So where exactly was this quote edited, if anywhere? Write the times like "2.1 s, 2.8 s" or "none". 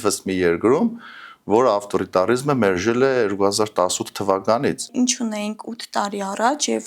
4.9 s